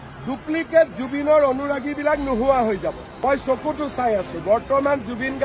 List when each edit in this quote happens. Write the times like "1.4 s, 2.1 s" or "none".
3.2 s